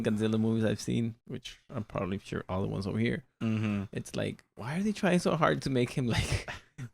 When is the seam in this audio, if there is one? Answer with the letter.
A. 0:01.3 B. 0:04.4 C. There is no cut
A